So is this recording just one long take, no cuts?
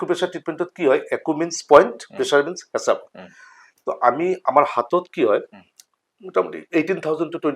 yes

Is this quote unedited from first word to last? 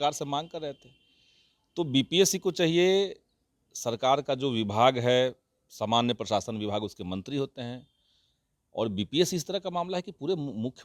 yes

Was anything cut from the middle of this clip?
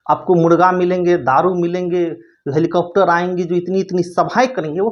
no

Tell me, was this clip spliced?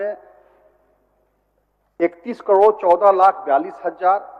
no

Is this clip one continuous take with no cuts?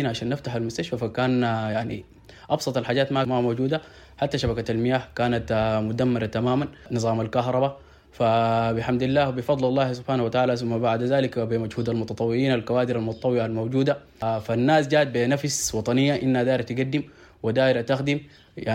no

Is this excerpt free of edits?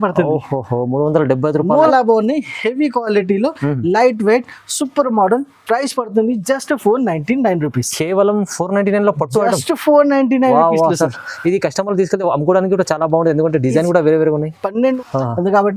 no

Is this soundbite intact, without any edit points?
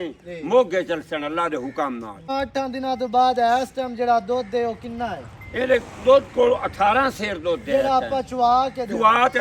no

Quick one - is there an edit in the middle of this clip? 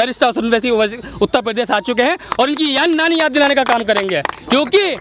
no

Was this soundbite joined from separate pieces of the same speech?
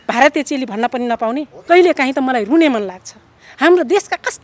yes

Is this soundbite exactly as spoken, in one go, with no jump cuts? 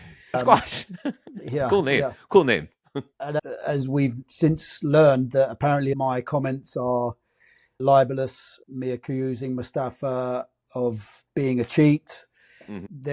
yes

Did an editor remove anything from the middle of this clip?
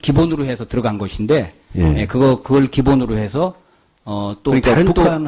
no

